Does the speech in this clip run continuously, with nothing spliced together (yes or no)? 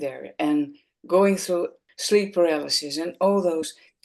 no